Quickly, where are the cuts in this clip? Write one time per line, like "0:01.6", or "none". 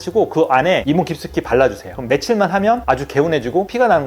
0:01.9